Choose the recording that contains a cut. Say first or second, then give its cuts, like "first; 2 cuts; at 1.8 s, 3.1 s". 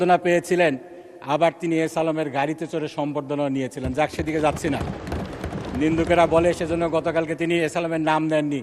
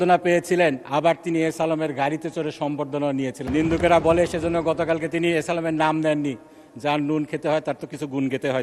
second; 2 cuts; at 0.8 s, 3.4 s